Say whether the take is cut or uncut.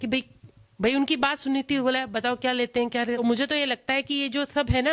cut